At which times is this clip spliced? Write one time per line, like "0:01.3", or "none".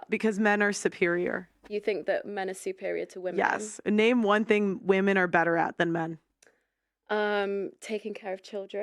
0:03.7